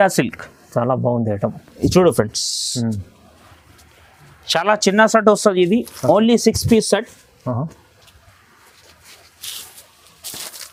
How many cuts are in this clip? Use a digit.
0